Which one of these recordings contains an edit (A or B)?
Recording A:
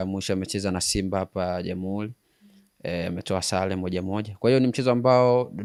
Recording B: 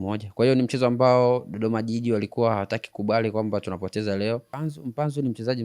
B